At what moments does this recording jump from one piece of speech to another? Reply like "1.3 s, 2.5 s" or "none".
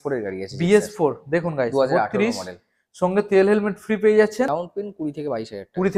4.5 s

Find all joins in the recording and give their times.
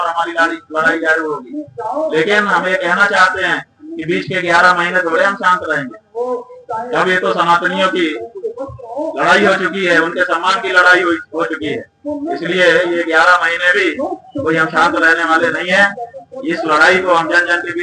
none

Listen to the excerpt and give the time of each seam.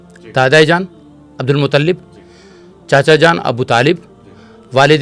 none

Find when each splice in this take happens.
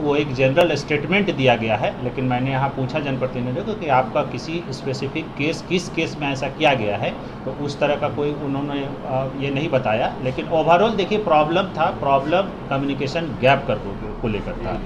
none

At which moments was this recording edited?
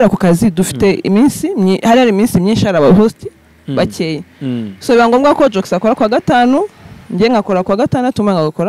none

